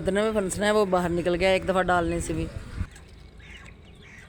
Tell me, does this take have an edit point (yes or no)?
no